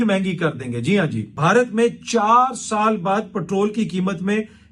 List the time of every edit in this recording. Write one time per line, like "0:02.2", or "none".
0:01.3